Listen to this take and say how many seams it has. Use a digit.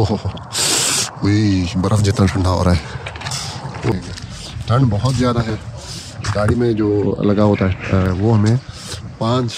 1